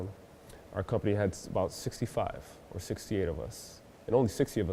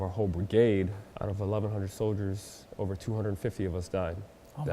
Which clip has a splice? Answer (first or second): second